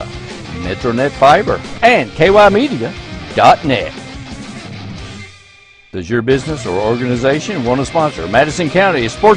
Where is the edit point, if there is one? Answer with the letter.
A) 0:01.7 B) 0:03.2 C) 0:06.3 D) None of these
A